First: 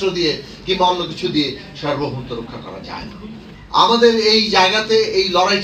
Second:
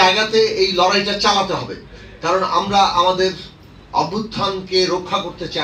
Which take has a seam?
first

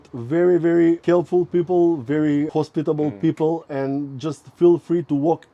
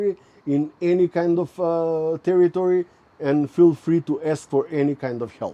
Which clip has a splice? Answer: first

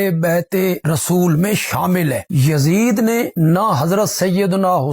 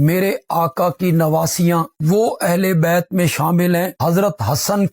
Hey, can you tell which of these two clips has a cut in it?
first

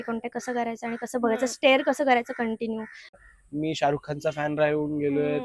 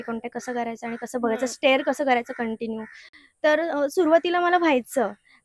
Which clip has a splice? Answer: first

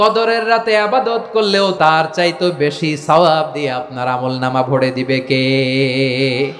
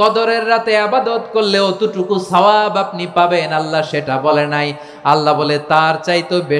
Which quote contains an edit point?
first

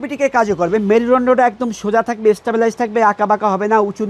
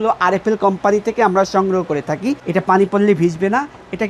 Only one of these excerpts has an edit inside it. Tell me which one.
second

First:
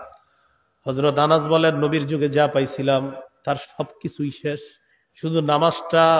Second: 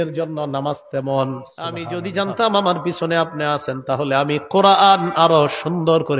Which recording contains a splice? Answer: second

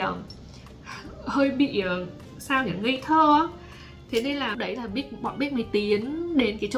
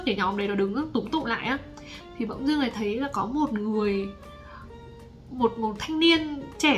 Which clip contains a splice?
first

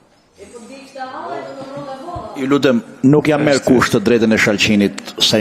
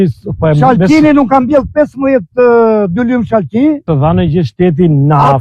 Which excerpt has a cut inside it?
second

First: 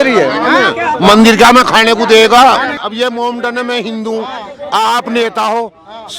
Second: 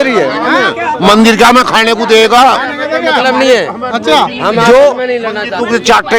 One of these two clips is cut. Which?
first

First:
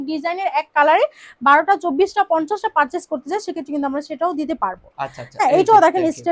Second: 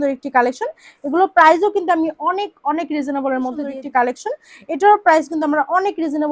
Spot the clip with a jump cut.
second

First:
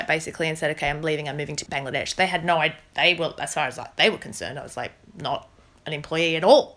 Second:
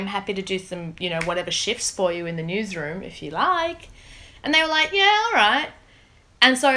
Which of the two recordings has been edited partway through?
first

